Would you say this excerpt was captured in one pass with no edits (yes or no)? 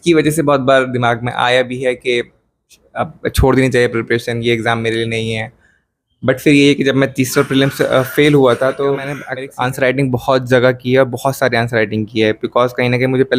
no